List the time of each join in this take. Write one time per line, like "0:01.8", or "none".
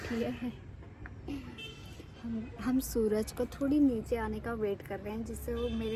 none